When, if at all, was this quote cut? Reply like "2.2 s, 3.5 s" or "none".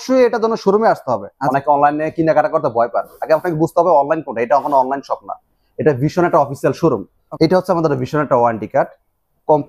1.3 s, 7.2 s